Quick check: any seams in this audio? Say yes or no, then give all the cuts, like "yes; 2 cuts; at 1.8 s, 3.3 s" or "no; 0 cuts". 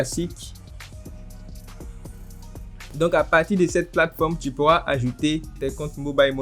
yes; 1 cut; at 2.8 s